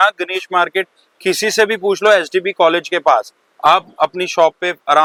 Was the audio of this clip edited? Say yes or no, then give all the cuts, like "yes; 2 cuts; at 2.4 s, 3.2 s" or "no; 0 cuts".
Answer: no; 0 cuts